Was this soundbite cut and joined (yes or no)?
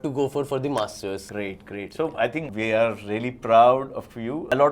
no